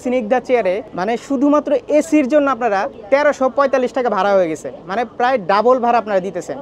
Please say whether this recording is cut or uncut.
cut